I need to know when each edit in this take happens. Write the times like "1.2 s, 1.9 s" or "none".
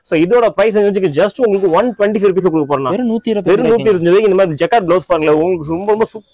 none